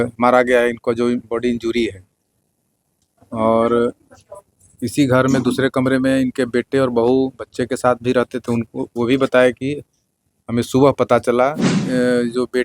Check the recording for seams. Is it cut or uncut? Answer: cut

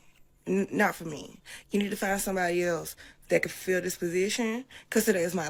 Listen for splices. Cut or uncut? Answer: uncut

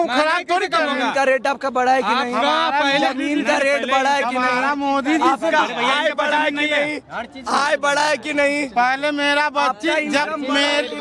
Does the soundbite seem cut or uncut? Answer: uncut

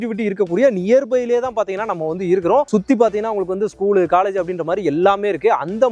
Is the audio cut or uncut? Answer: uncut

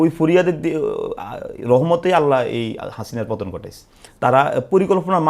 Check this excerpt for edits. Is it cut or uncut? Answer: cut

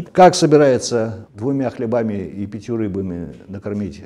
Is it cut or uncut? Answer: cut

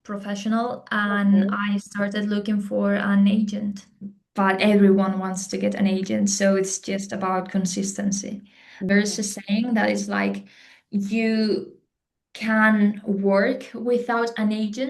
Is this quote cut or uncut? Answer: cut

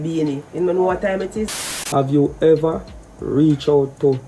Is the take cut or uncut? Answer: cut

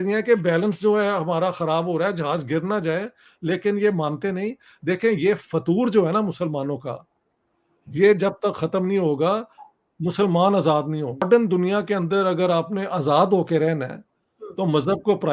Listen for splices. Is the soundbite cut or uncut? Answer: cut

